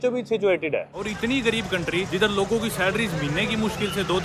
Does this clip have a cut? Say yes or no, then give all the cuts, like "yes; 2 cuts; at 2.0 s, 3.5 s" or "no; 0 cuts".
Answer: yes; 2 cuts; at 1.0 s, 2.1 s